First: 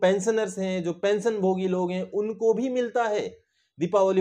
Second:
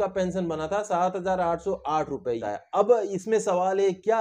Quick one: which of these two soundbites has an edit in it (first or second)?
second